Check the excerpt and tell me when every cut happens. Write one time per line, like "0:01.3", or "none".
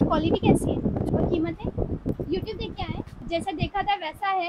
0:01.1
0:02.1
0:03.2